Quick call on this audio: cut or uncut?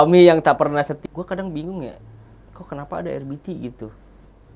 cut